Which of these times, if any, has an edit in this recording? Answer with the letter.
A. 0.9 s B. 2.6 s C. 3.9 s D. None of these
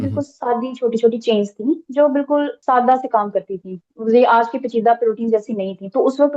B